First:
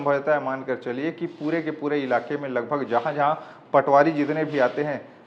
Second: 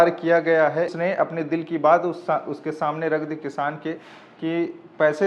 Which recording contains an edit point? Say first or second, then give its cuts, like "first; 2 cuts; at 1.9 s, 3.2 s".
second; 1 cut; at 0.9 s